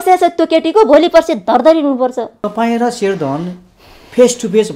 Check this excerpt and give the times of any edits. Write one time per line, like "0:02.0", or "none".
0:02.3